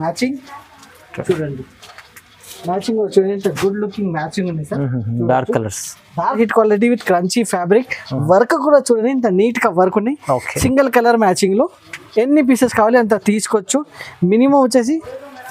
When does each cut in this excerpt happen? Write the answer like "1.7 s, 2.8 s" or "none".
6.4 s

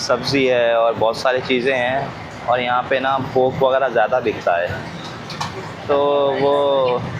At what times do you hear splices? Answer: none

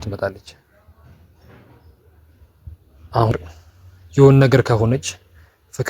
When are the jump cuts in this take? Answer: 3.3 s

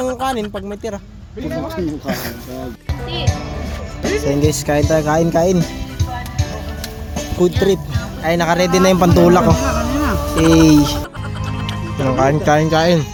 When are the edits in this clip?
none

